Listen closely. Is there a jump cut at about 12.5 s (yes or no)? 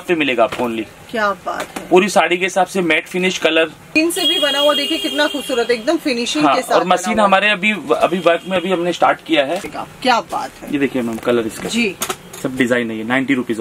no